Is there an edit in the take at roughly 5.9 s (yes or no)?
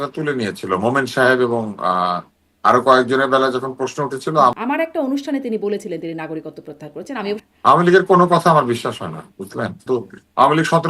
no